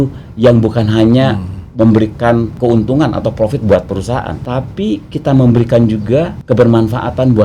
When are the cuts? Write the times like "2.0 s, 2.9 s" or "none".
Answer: 2.5 s, 4.2 s, 6.4 s